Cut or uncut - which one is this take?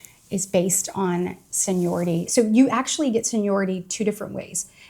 cut